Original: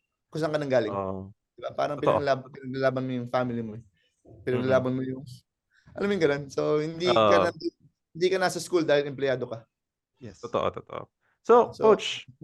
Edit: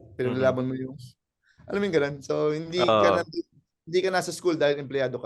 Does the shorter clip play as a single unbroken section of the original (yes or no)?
yes